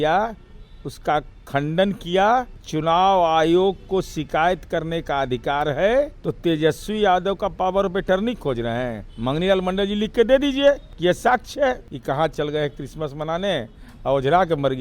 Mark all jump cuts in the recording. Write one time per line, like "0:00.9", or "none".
0:02.6
0:06.2
0:09.0
0:10.9
0:12.3